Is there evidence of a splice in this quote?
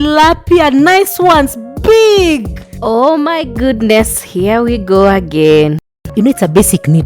yes; 1 cut; at 6.0 s

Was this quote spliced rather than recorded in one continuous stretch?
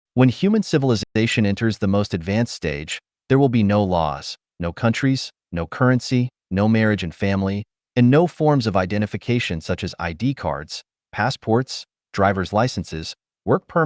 no; 0 cuts

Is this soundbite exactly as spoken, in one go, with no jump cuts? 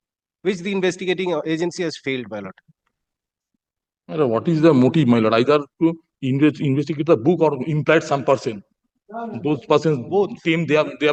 yes; 0 cuts

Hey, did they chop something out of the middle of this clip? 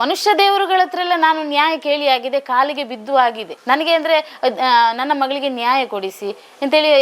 no; 0 cuts

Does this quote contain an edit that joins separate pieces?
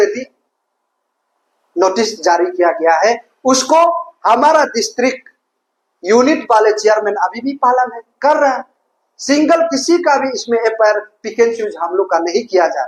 no; 0 cuts

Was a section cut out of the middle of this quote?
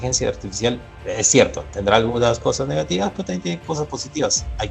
yes; 1 cut; at 0.9 s

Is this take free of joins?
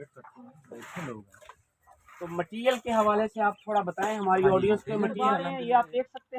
no; 1 cut; at 5.4 s

